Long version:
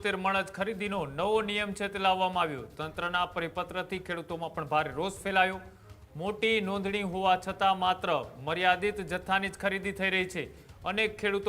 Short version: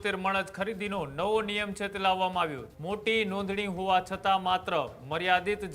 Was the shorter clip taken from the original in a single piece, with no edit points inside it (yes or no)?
no